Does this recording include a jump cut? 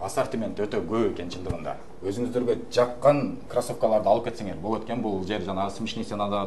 no; 0 cuts

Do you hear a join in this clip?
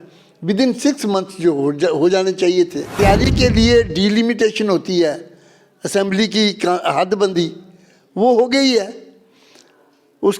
yes; 1 cut; at 2.8 s

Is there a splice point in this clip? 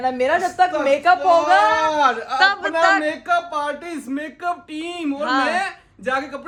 no; 0 cuts

